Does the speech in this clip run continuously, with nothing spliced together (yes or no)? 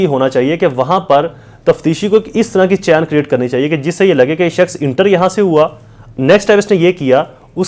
yes